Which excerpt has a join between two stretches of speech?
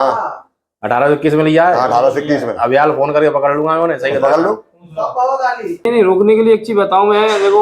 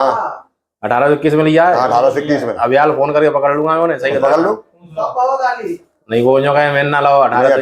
first; 1 cut; at 5.9 s

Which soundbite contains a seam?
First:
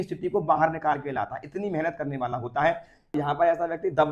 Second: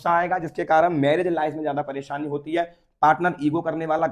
first; 1 cut; at 3.1 s

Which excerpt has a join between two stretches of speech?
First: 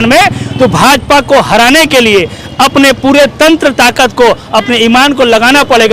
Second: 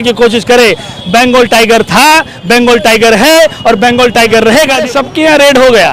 second; 1 cut; at 4.8 s

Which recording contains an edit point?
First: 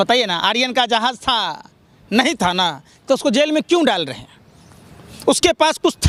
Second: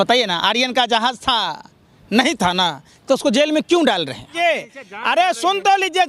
second; 1 cut; at 4.3 s

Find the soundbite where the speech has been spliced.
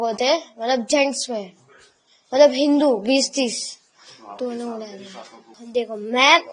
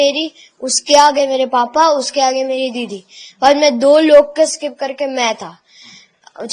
first; 1 cut; at 5.6 s

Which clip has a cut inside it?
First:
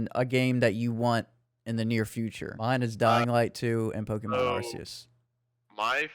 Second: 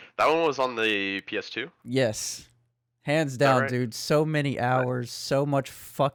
first; 1 cut; at 2.5 s

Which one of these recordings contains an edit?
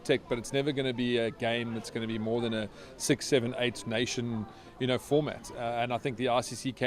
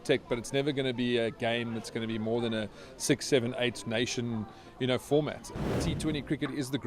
second; 1 cut; at 5.7 s

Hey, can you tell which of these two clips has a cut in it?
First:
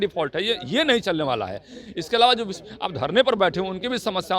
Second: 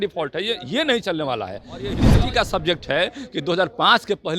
second; 1 cut; at 2.0 s

